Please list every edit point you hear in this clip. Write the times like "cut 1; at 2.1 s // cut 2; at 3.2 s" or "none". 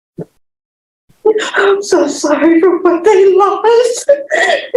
none